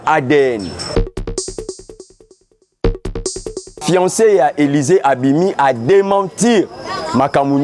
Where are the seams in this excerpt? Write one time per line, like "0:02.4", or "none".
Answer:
0:00.9
0:03.8